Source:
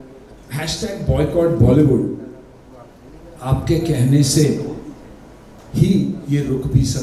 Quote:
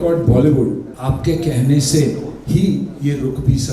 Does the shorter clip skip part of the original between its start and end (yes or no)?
yes